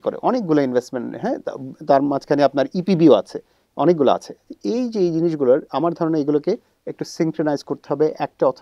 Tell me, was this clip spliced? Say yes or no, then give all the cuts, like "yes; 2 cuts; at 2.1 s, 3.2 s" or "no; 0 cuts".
no; 0 cuts